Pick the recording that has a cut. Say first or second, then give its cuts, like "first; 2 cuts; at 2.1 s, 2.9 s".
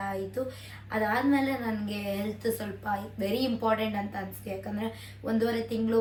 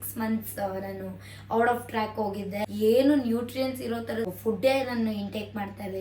second; 2 cuts; at 2.7 s, 4.3 s